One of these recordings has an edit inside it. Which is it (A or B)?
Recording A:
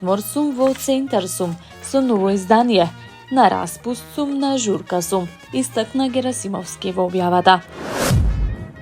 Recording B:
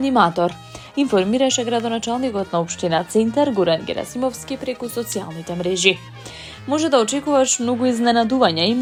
A